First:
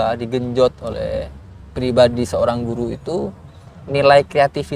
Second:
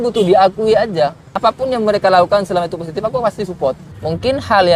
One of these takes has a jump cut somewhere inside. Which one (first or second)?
second